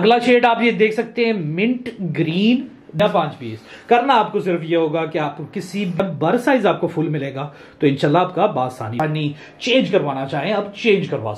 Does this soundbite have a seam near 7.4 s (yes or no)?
no